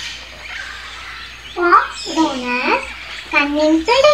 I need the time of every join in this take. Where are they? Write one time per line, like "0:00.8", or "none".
0:01.4